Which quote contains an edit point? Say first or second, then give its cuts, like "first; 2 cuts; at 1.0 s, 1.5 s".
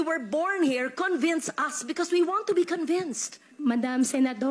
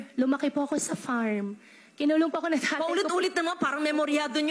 first; 1 cut; at 3.5 s